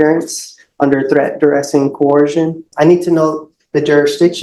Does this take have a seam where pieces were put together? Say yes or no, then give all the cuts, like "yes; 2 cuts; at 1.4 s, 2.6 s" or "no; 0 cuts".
yes; 1 cut; at 2.7 s